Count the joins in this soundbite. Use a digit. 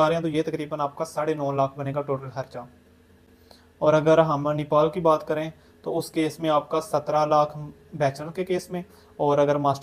0